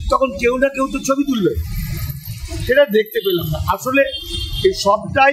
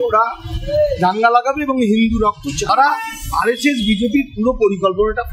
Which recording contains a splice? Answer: second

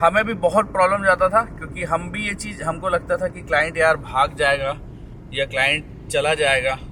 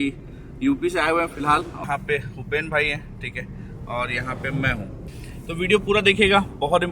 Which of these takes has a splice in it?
second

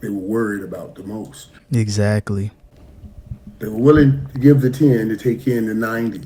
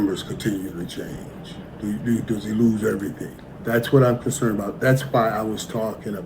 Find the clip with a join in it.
second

